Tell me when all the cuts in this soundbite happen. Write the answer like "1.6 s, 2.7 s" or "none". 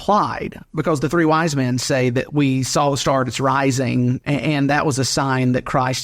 4.2 s